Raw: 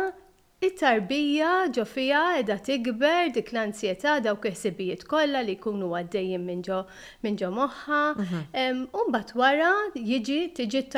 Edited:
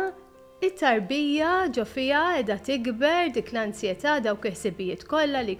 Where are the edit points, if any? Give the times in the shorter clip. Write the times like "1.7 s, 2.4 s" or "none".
none